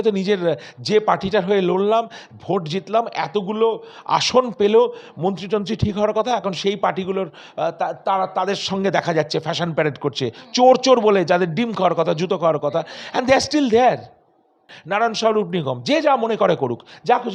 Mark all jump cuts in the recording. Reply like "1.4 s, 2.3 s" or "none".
14.7 s